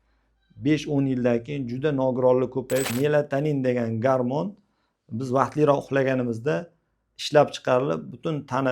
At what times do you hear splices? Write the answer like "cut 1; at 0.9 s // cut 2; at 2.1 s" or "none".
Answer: cut 1; at 2.9 s